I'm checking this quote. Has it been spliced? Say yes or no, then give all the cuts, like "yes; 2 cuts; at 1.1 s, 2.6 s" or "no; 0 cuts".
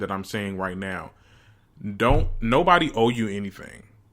no; 0 cuts